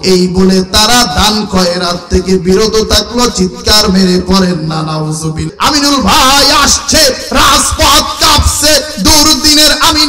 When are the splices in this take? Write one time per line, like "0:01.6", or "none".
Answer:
0:05.5